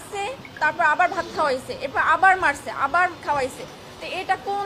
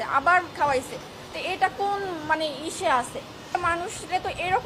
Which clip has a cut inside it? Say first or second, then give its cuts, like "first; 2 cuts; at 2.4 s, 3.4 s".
second; 1 cut; at 3.5 s